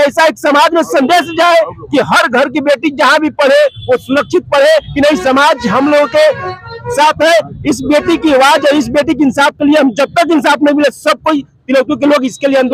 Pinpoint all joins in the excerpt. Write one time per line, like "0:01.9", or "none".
none

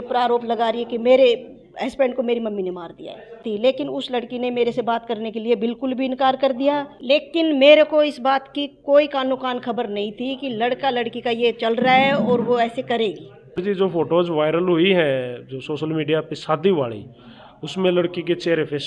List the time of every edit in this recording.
0:03.4
0:06.9
0:13.6

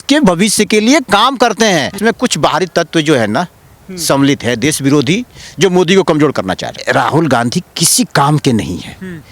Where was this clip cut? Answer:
0:02.0
0:06.7

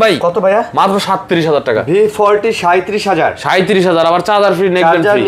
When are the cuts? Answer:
none

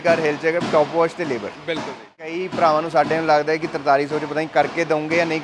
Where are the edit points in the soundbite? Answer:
0:02.3

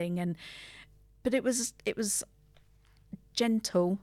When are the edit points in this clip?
0:01.2

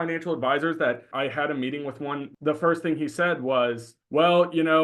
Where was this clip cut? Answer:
0:01.1
0:02.3
0:03.9

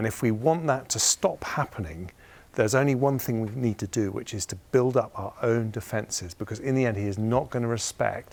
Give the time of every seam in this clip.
none

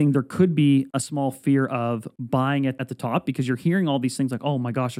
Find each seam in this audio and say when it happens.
0:01.0
0:02.1
0:02.9

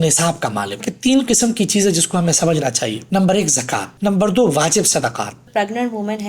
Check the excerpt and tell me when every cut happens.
0:00.8
0:03.0
0:03.9
0:05.4

